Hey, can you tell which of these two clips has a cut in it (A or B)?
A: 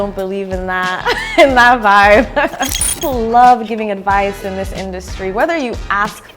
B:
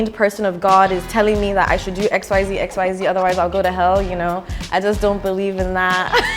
A